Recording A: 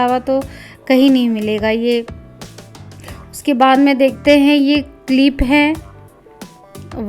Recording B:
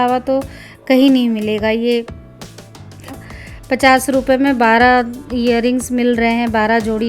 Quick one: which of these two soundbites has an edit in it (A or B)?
B